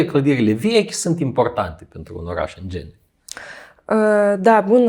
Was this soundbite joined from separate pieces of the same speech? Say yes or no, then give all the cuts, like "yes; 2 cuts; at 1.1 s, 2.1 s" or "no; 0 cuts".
no; 0 cuts